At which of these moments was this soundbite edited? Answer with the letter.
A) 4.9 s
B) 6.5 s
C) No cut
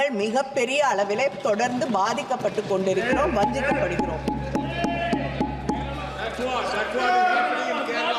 C